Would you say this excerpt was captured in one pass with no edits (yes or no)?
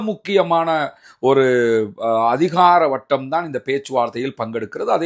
yes